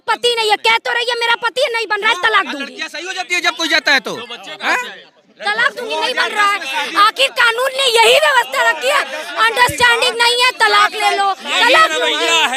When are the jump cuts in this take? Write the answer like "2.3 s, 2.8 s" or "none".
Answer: none